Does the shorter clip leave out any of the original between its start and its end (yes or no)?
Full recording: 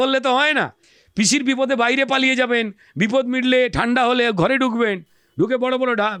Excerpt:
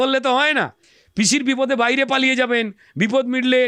no